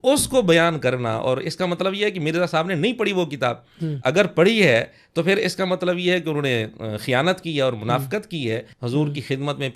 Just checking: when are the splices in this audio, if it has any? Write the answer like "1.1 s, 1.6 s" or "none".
8.7 s